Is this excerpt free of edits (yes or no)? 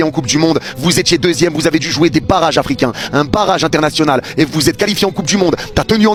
yes